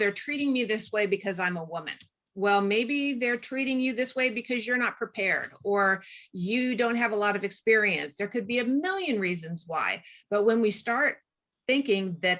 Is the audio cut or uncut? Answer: uncut